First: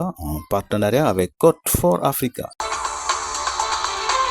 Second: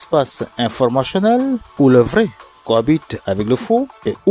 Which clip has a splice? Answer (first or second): first